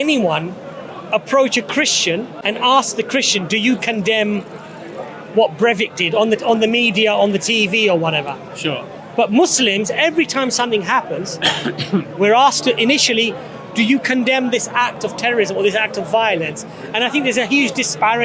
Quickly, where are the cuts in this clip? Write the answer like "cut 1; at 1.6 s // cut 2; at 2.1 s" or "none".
cut 1; at 2.3 s